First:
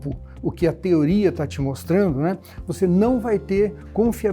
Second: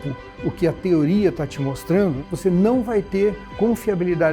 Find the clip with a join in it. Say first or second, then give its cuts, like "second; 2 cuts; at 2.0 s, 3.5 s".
second; 1 cut; at 2.2 s